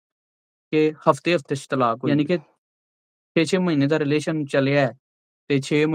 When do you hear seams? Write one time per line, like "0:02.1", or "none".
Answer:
0:02.0

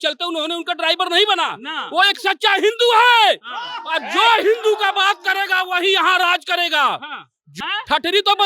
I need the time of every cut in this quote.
0:07.5

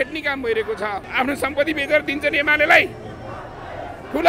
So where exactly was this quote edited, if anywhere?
0:01.0

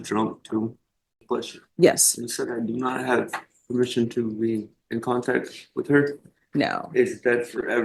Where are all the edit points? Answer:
0:01.2

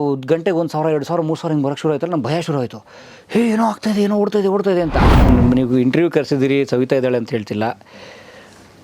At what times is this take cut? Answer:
0:05.3

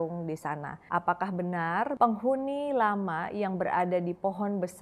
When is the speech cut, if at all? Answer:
0:01.9

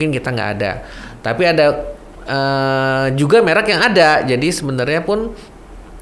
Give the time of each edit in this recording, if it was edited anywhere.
none

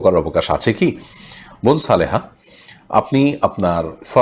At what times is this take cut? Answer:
none

